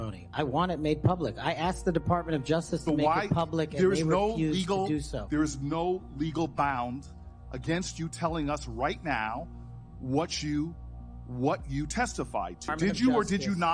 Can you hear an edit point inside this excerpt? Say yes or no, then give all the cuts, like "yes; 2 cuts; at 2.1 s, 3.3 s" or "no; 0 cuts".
yes; 1 cut; at 12.7 s